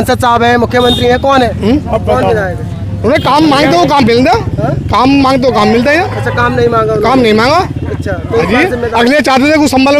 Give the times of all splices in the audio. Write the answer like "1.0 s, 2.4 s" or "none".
none